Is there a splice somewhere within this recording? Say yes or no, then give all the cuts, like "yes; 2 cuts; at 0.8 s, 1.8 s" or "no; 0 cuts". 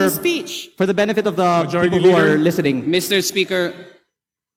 no; 0 cuts